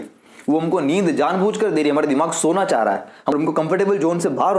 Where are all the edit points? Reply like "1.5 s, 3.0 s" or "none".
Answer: 3.3 s